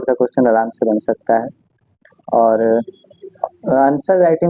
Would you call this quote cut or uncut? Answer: uncut